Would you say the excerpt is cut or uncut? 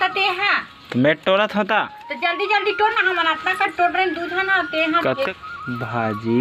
cut